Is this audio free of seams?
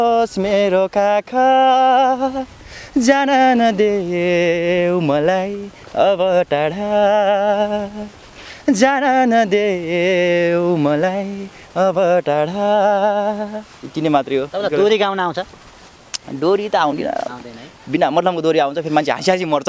yes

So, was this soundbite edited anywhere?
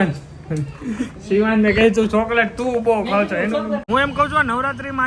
yes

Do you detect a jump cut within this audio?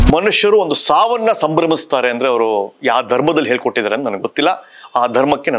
no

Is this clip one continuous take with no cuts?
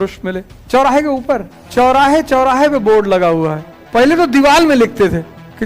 no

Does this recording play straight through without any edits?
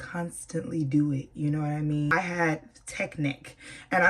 no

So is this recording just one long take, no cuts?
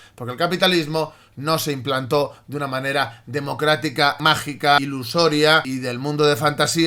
yes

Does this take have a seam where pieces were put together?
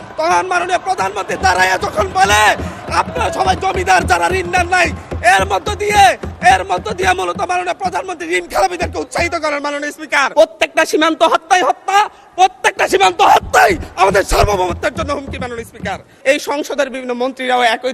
yes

